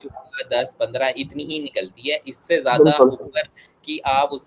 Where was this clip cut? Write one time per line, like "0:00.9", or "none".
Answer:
none